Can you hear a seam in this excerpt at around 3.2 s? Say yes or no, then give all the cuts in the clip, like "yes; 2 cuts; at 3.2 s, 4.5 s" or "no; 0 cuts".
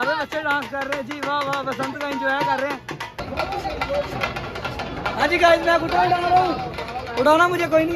yes; 1 cut; at 3.2 s